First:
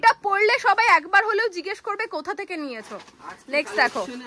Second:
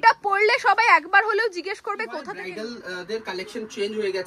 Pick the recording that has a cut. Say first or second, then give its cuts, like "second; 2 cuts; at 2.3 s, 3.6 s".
second; 1 cut; at 2.3 s